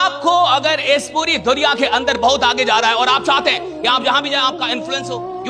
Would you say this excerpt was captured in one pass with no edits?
yes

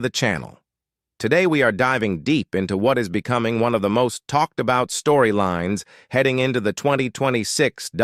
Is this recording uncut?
yes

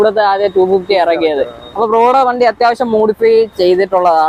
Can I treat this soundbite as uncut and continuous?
yes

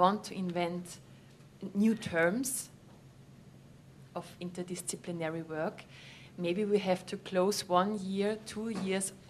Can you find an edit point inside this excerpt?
no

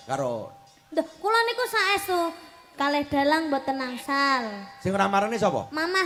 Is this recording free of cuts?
yes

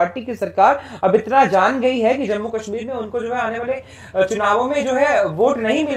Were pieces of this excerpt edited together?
no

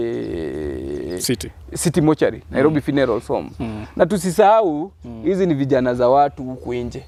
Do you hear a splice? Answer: no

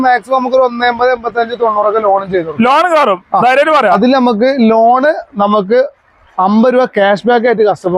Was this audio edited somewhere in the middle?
yes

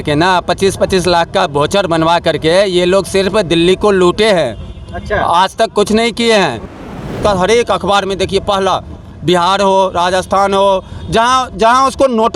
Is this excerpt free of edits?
no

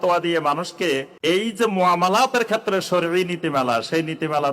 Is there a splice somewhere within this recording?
yes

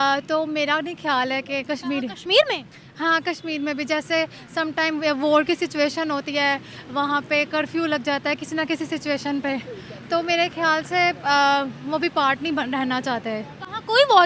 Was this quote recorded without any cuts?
yes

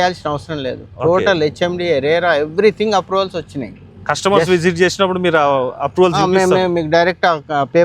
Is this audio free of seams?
yes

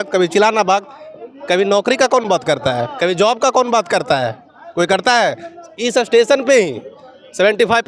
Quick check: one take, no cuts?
yes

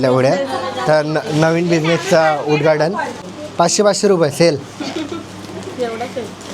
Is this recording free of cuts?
no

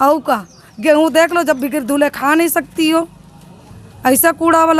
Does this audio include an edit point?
no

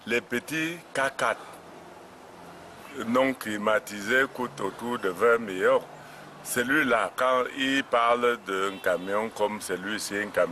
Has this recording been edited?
yes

